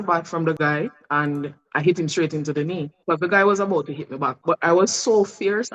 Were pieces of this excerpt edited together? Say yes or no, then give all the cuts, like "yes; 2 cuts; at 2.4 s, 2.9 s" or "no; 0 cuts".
yes; 1 cut; at 2.9 s